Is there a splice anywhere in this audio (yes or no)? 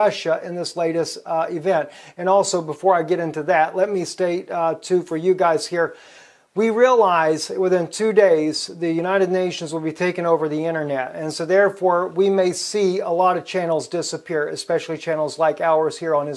no